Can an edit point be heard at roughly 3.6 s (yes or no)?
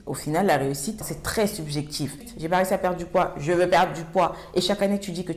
no